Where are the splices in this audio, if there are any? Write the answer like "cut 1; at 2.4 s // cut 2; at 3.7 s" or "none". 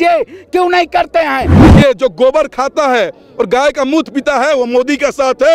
cut 1; at 1.6 s